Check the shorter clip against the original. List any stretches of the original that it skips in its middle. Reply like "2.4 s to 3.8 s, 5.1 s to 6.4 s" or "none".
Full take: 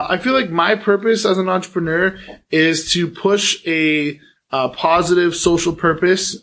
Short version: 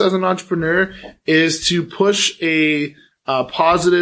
none